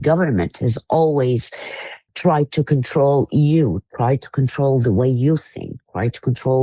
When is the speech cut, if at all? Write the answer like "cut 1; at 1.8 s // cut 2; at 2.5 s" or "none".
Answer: cut 1; at 2.0 s